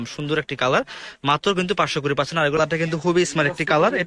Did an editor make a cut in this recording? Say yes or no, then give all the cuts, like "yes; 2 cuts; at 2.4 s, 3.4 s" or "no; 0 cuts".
yes; 1 cut; at 2.6 s